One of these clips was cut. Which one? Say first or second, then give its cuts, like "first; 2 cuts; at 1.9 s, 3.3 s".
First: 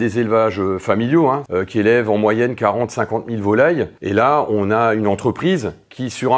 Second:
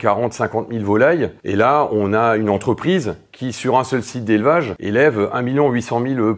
first; 1 cut; at 1.5 s